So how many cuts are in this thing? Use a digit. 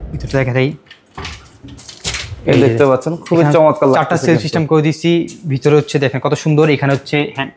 0